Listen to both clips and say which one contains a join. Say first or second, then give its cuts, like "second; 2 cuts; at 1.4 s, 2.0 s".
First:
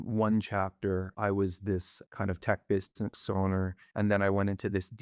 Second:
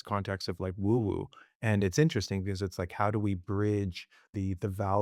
first; 2 cuts; at 1.1 s, 2.0 s